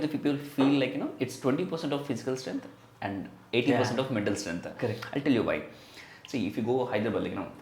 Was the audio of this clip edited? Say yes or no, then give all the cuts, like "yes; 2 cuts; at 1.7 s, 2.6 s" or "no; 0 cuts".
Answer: no; 0 cuts